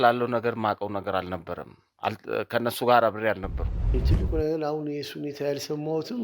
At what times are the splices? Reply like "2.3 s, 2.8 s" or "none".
4.0 s